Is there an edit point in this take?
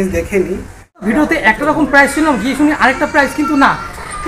yes; 1 cut; at 1.0 s

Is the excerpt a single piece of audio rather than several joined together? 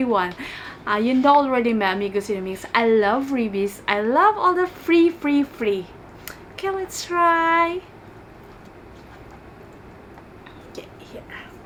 yes; 0 cuts

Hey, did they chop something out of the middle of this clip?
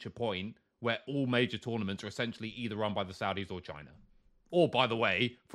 no; 0 cuts

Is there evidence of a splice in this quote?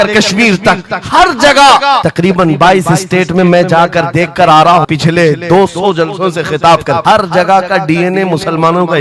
yes; 3 cuts; at 2.1 s, 4.9 s, 7.0 s

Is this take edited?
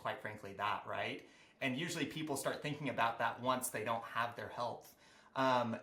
no; 0 cuts

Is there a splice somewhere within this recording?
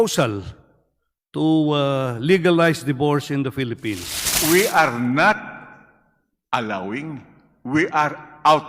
yes; 1 cut; at 4.1 s

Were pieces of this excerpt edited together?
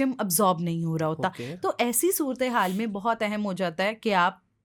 no; 0 cuts

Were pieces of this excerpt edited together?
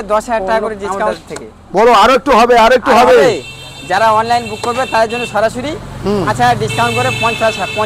yes; 1 cut; at 1.0 s

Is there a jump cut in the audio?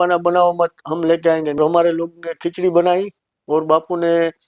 yes; 1 cut; at 1.6 s

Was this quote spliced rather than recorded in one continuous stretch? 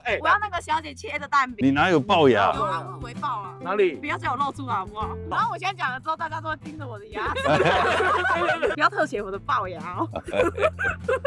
yes; 3 cuts; at 1.5 s, 5.3 s, 8.8 s

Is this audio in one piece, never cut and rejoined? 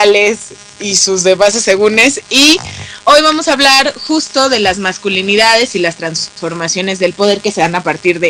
no; 1 cut; at 4.4 s

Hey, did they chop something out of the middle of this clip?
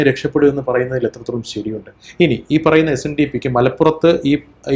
no; 0 cuts

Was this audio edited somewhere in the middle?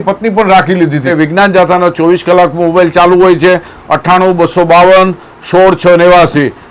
yes; 1 cut; at 1.1 s

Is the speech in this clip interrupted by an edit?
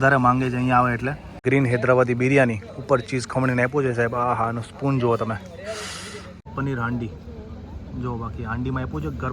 yes; 2 cuts; at 1.4 s, 6.5 s

